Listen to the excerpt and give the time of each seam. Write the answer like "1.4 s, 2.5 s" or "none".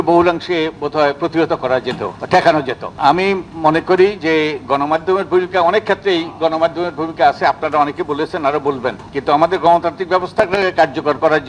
2.1 s, 2.9 s, 9.1 s